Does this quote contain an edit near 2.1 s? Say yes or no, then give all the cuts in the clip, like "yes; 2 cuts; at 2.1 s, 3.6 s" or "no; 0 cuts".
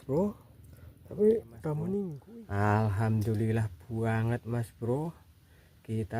yes; 1 cut; at 2.1 s